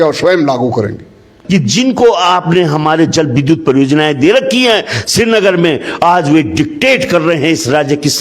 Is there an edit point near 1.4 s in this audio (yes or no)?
yes